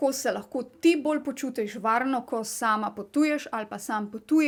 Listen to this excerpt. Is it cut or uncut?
uncut